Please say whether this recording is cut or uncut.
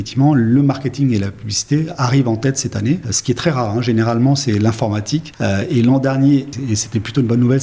cut